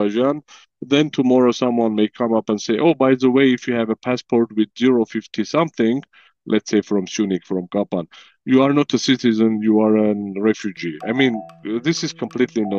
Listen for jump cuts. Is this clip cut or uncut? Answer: cut